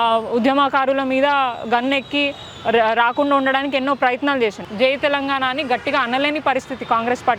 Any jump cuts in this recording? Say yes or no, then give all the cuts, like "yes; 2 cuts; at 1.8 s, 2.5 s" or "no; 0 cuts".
yes; 1 cut; at 4.7 s